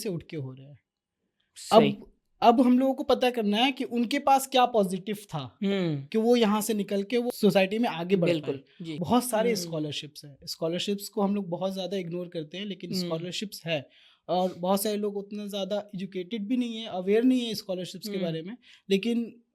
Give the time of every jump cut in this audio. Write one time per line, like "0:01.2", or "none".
0:07.3
0:08.8